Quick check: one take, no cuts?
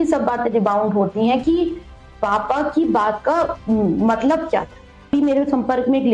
no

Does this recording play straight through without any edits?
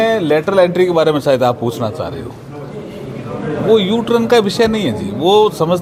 yes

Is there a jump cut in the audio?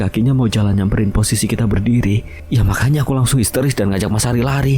yes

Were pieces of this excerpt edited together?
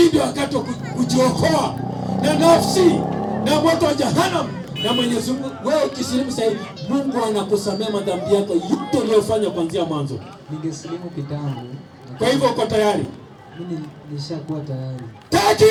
no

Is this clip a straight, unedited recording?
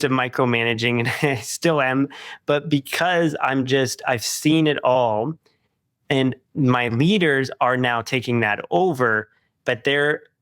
yes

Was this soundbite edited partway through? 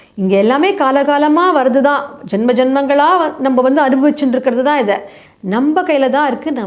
yes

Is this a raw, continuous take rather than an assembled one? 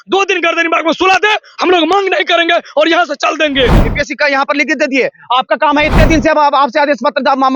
no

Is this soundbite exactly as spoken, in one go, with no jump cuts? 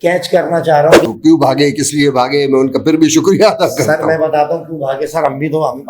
no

